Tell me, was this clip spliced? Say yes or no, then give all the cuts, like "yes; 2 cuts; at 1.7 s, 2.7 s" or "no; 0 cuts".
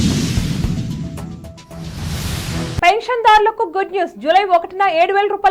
no; 0 cuts